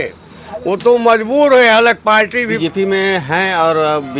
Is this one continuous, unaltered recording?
no; 1 cut; at 2.4 s

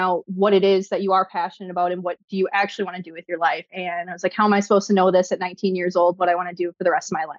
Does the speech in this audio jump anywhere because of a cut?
yes; 1 cut; at 3.8 s

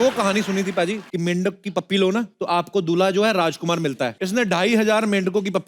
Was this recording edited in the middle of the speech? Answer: yes; 3 cuts; at 1.0 s, 2.3 s, 4.2 s

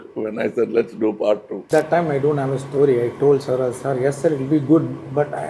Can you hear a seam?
yes; 1 cut; at 1.7 s

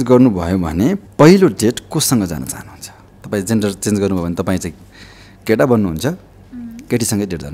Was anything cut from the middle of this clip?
yes; 1 cut; at 1.0 s

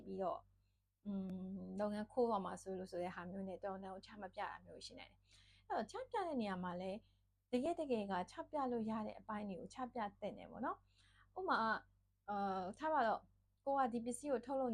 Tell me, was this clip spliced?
no; 0 cuts

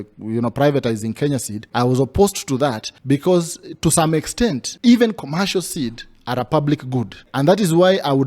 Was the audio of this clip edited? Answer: yes; 4 cuts; at 1.6 s, 2.9 s, 4.7 s, 7.2 s

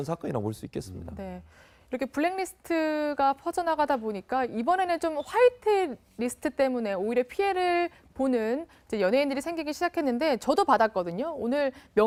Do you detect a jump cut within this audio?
no; 0 cuts

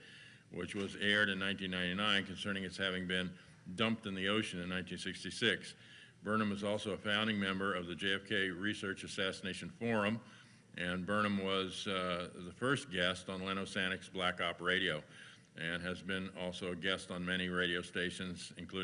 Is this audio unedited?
no; 1 cut; at 8.3 s

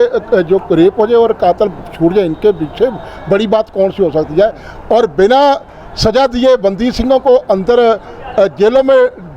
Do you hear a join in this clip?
no; 0 cuts

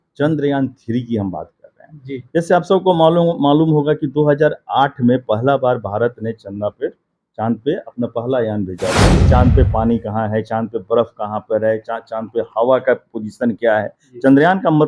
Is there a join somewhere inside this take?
yes; 1 cut; at 9.2 s

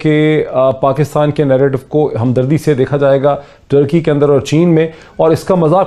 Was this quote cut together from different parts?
no; 0 cuts

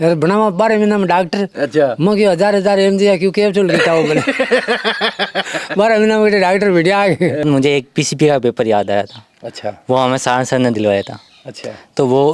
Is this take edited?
yes; 1 cut; at 7.4 s

